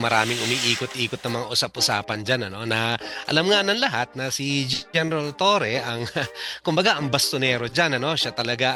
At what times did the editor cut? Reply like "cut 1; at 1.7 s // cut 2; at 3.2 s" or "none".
none

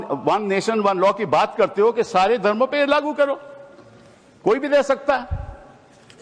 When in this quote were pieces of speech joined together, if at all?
none

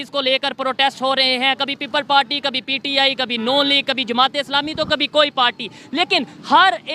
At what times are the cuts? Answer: none

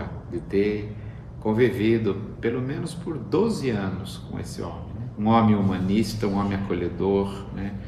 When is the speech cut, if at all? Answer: cut 1; at 5.0 s

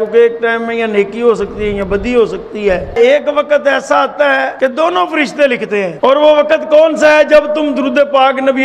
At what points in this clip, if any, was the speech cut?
cut 1; at 2.9 s // cut 2; at 4.5 s // cut 3; at 5.9 s

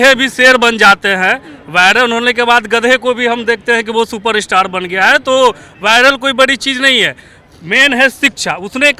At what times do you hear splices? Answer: none

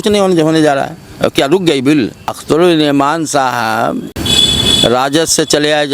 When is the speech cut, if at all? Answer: cut 1; at 2.4 s // cut 2; at 4.2 s

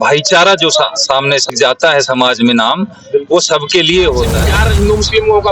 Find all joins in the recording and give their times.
cut 1; at 1.5 s // cut 2; at 4.6 s

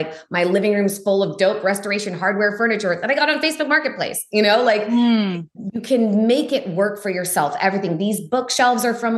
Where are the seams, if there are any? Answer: none

